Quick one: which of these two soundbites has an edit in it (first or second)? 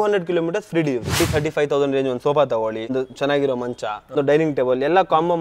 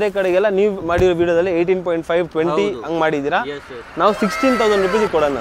first